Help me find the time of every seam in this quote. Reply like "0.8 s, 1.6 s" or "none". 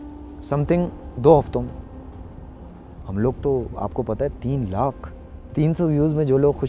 5.3 s